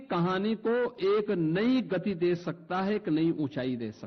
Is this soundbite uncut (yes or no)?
yes